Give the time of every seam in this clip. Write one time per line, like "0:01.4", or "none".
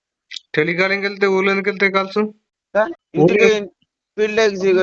0:03.0

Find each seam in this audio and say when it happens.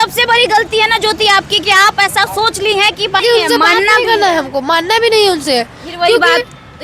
0:03.2

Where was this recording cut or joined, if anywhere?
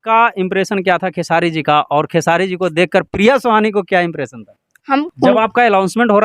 0:05.0

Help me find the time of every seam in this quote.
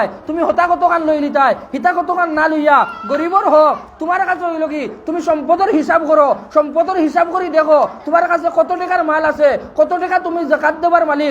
none

